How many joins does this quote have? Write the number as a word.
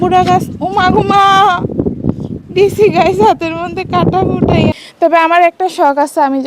one